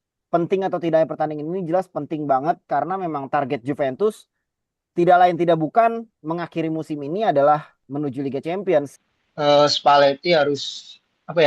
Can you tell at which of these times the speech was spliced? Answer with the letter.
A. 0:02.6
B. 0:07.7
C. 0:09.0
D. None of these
C